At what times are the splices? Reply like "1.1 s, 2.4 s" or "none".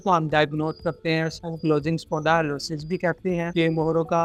none